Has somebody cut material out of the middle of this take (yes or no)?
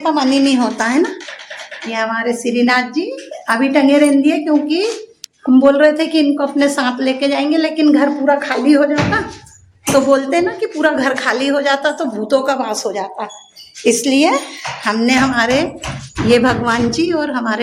no